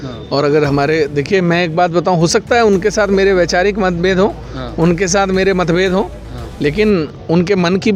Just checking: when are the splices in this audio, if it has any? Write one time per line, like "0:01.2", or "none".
none